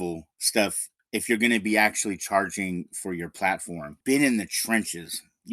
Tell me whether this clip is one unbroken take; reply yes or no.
no